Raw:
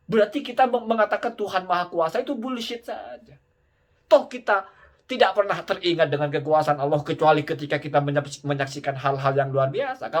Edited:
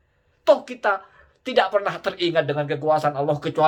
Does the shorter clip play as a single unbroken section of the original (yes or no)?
yes